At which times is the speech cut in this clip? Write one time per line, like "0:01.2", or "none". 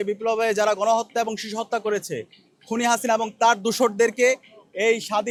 none